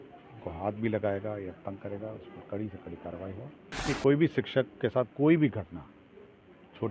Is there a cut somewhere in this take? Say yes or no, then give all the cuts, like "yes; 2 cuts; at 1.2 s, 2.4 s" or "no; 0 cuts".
yes; 1 cut; at 3.9 s